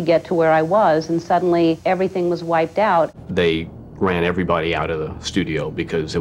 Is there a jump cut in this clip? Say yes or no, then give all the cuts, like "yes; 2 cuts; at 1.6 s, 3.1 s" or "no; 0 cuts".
yes; 2 cuts; at 1.8 s, 3.2 s